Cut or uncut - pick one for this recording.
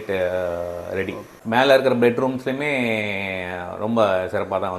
cut